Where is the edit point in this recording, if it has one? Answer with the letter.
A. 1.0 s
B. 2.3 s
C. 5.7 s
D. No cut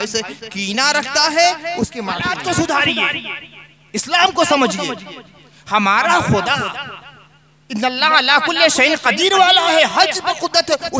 B